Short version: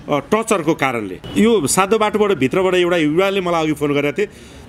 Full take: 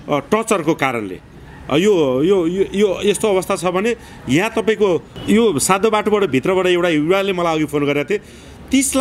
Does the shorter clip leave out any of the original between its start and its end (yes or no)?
yes